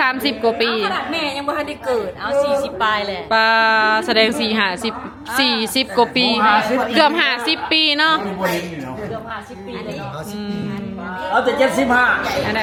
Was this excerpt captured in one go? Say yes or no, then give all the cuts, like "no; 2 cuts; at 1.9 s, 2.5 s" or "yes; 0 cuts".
yes; 0 cuts